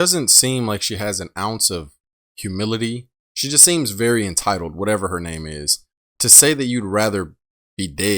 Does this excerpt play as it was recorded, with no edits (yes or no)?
no